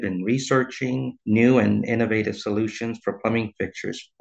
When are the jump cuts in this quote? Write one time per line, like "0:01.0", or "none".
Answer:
0:01.1